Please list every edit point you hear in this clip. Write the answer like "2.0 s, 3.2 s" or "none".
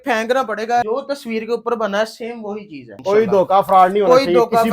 0.8 s, 2.9 s